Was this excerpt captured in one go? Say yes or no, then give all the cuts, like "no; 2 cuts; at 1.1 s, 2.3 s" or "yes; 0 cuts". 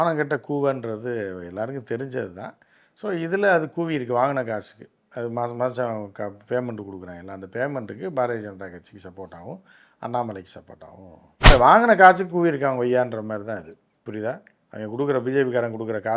no; 1 cut; at 11.5 s